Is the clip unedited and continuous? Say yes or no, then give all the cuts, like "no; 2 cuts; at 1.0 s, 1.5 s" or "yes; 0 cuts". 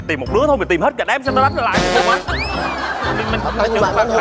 yes; 0 cuts